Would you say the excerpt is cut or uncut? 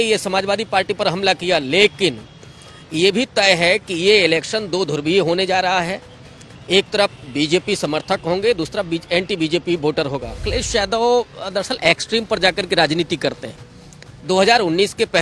cut